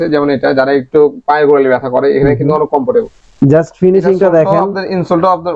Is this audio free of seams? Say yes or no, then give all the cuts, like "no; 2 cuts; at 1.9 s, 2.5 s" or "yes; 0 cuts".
no; 1 cut; at 3.2 s